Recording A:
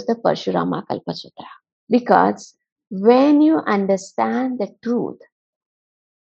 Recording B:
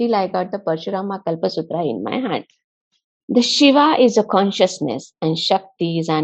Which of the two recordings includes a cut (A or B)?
B